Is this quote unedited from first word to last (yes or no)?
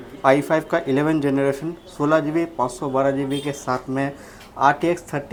yes